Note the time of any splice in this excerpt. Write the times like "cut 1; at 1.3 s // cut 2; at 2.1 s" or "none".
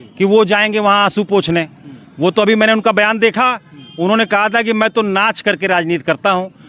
none